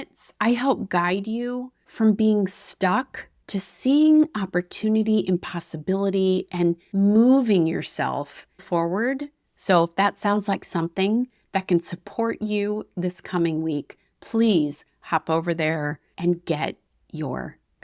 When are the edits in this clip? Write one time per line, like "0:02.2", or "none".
0:09.4